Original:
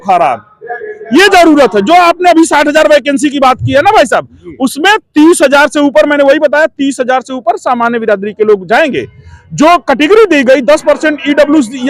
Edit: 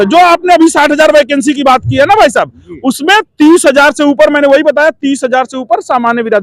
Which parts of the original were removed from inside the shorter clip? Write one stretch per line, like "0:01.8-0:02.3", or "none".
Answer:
none